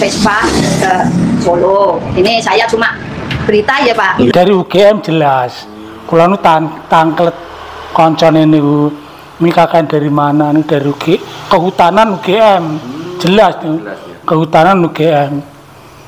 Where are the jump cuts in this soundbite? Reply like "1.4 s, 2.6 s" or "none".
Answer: 4.3 s

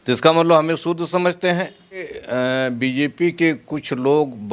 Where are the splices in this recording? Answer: 2.2 s

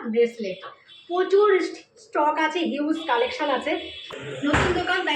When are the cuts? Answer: 4.0 s

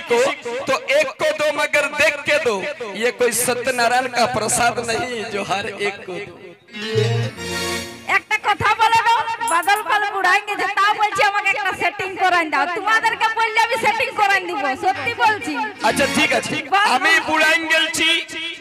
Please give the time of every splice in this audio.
7.2 s, 16.6 s

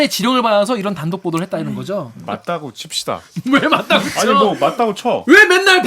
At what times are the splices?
2.3 s

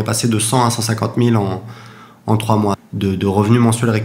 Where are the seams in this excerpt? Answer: 2.8 s

